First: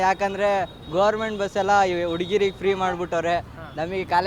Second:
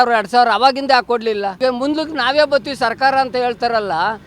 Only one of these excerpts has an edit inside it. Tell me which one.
second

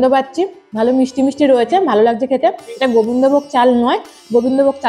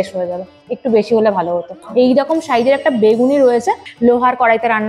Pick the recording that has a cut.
second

